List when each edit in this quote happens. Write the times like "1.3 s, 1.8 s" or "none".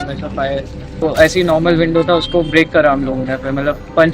1.0 s